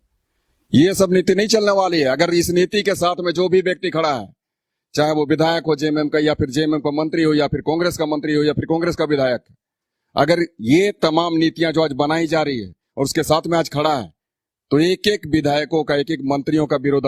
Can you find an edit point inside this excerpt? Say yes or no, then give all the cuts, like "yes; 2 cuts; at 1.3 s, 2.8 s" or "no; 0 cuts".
no; 0 cuts